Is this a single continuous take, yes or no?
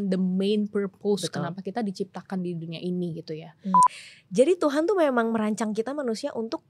no